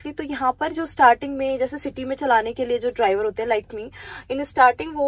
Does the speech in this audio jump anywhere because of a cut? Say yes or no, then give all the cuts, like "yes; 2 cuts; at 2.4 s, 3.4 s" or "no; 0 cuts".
no; 0 cuts